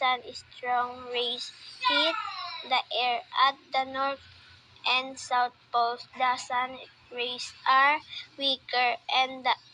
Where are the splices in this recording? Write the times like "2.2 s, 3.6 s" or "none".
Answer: 3.3 s